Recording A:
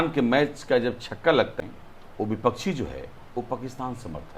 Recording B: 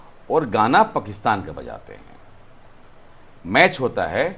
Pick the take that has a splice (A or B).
A